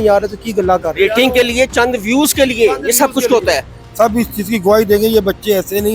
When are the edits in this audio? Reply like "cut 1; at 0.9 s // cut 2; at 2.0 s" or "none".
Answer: cut 1; at 3.8 s

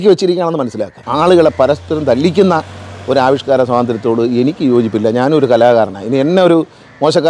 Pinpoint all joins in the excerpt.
cut 1; at 1.0 s

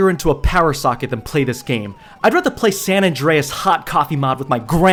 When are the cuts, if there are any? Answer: none

